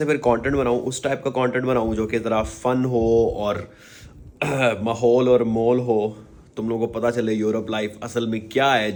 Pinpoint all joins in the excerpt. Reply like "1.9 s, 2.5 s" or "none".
none